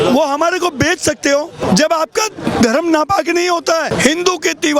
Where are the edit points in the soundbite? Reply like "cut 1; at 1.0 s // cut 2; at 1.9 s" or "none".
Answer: cut 1; at 1.6 s // cut 2; at 3.9 s